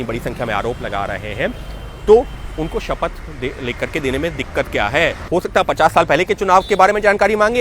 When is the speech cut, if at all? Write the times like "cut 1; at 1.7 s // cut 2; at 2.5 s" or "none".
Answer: cut 1; at 5.2 s